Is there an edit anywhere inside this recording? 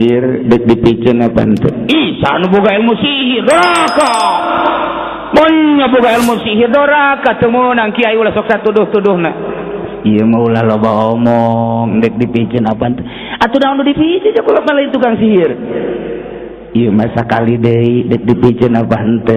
no; 0 cuts

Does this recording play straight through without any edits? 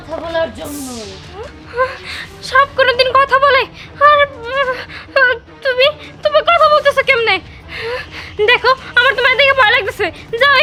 yes; 0 cuts

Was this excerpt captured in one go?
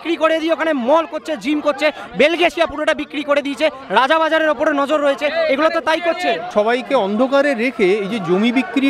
yes; 0 cuts

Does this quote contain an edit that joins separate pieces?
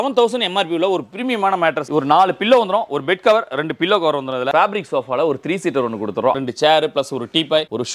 yes; 3 cuts; at 1.8 s, 4.5 s, 6.3 s

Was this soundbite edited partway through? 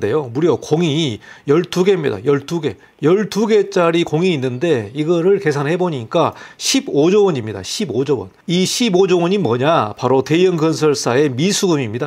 no; 0 cuts

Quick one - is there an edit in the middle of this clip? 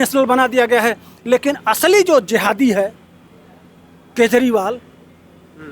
no; 0 cuts

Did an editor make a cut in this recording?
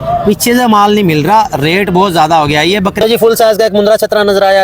yes; 1 cut; at 2.9 s

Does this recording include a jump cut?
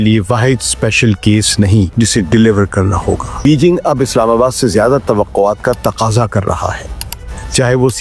yes; 2 cuts; at 1.9 s, 3.4 s

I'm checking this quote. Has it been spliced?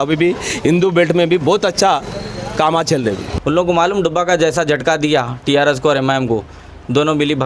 yes; 1 cut; at 3.3 s

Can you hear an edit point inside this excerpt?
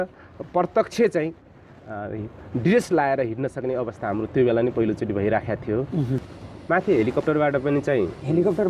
yes; 1 cut; at 6.3 s

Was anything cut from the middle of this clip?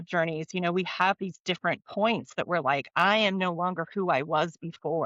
no; 0 cuts

